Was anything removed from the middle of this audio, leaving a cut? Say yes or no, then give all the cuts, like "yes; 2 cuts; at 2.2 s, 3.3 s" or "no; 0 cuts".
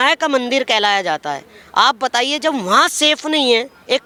no; 0 cuts